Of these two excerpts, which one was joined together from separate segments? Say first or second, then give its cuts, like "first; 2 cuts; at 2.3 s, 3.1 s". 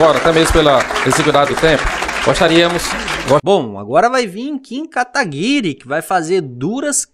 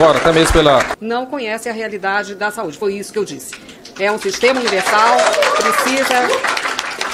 second; 1 cut; at 0.9 s